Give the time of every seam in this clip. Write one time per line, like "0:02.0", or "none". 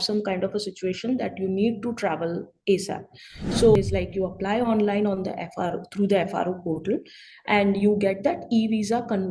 0:03.8